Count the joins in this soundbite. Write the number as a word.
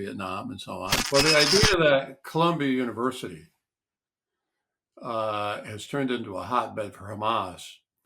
one